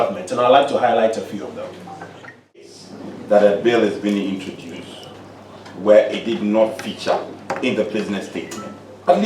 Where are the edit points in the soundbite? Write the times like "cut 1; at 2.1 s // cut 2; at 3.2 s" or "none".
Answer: cut 1; at 2.8 s

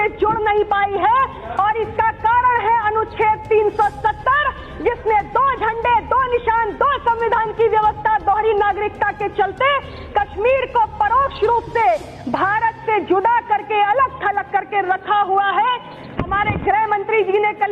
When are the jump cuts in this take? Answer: none

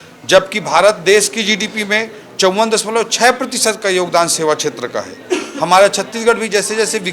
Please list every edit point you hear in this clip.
none

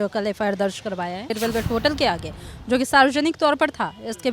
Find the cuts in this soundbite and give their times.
cut 1; at 1.3 s

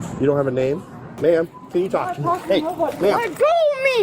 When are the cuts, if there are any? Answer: cut 1; at 1.0 s

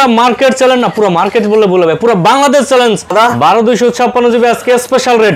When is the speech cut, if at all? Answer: cut 1; at 3.1 s

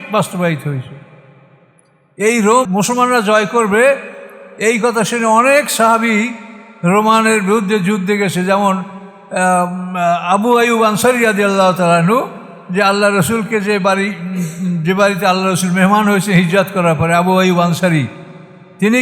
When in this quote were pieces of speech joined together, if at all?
cut 1; at 2.6 s

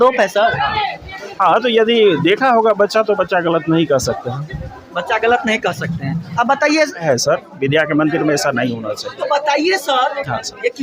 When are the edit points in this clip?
cut 1; at 7.0 s

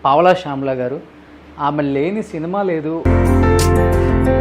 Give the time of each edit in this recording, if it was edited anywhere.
cut 1; at 3.0 s

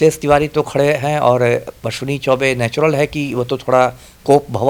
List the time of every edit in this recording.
none

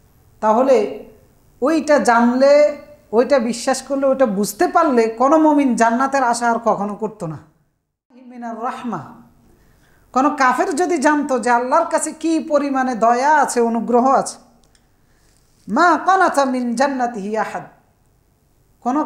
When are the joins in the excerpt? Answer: cut 1; at 8.3 s

